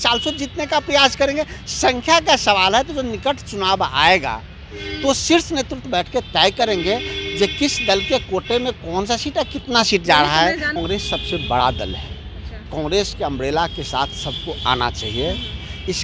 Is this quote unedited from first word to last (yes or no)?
no